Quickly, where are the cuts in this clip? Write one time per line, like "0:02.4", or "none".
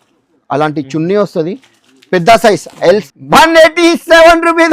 0:03.0